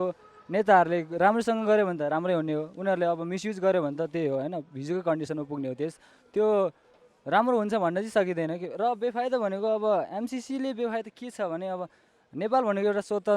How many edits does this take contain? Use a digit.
0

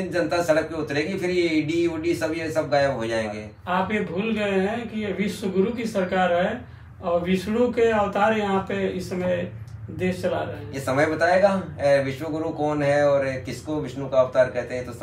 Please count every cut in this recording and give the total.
1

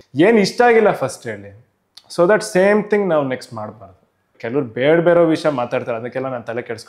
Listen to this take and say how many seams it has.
1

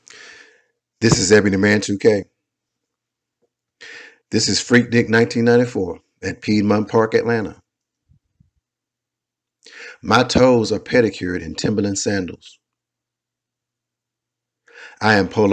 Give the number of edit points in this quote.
0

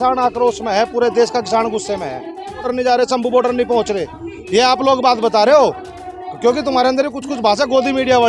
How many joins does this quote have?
1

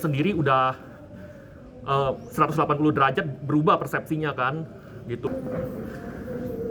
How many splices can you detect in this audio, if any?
1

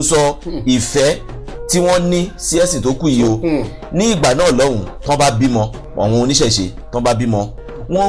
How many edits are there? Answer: 1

